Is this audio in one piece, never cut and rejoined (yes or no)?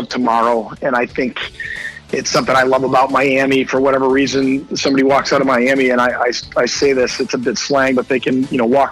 yes